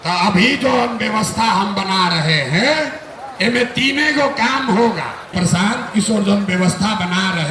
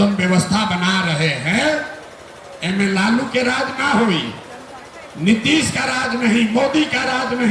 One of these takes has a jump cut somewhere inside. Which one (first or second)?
first